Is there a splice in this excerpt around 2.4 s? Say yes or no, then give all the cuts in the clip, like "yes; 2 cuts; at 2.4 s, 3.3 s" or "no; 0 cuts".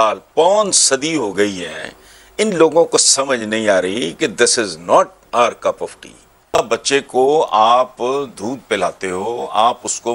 no; 1 cut; at 6.5 s